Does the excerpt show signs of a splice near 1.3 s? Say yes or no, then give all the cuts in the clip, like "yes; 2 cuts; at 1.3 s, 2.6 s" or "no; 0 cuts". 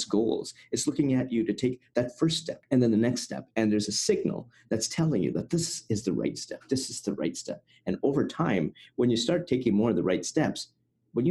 no; 1 cut; at 2.5 s